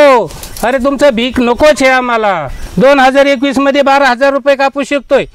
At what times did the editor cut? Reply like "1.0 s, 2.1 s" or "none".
2.6 s